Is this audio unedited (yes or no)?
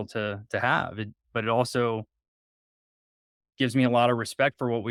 yes